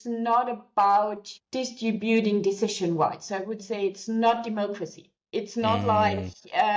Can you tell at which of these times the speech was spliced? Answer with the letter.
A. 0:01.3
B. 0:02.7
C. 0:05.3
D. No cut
A